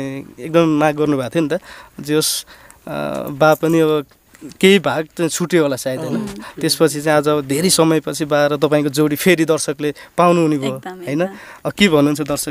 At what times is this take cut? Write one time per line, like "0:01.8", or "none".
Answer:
none